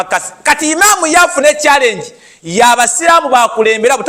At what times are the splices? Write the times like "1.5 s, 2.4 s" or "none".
none